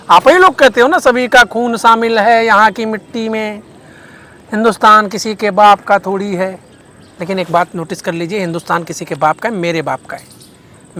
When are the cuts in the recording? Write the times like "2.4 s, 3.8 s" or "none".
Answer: none